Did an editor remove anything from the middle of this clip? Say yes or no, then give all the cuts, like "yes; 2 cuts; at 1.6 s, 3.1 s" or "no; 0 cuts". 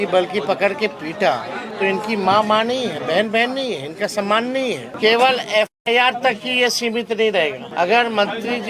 yes; 3 cuts; at 1.6 s, 4.9 s, 7.6 s